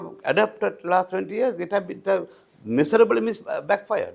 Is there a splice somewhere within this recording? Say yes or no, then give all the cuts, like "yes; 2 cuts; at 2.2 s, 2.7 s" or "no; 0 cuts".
no; 0 cuts